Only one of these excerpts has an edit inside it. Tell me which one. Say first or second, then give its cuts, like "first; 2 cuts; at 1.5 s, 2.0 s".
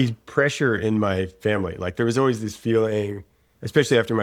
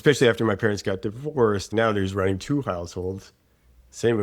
second; 1 cut; at 1.7 s